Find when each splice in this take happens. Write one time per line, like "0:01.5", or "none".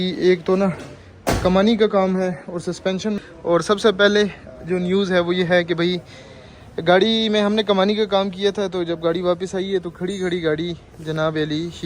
0:03.3